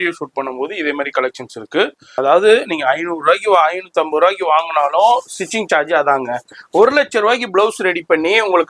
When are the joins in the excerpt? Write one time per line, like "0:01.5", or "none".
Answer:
0:02.1